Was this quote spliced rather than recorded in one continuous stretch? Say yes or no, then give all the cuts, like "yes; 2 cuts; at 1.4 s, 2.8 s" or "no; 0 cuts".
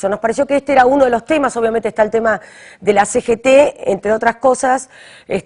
no; 0 cuts